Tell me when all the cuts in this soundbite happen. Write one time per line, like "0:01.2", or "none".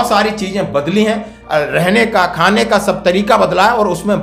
none

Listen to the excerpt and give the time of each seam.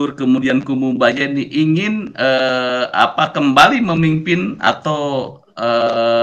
none

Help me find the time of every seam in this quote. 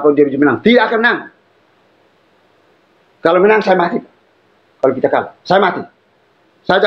none

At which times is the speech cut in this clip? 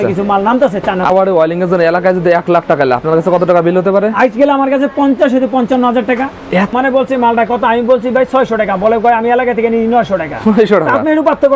0:01.1
0:06.7

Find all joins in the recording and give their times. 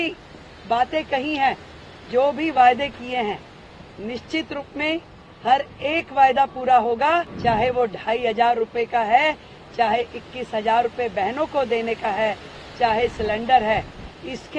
0:07.3

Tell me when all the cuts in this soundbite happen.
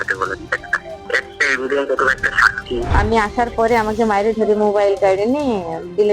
0:02.9

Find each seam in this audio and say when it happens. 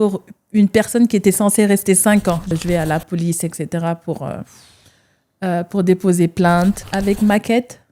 0:02.5
0:06.9

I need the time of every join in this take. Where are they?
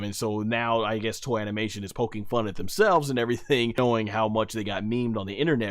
0:03.8

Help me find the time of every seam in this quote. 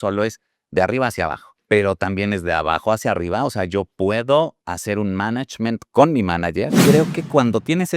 0:01.5
0:04.6
0:06.8

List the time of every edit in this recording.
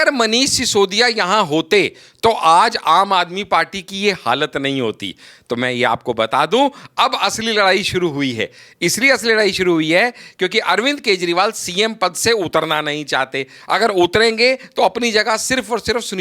none

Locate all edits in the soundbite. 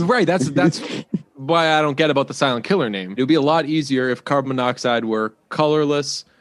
0:03.2

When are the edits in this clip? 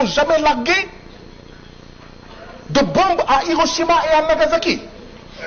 none

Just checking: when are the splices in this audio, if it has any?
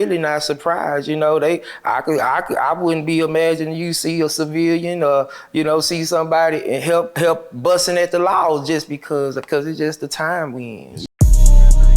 0:10.9

